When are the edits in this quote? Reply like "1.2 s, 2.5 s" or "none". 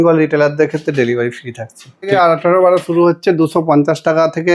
2.1 s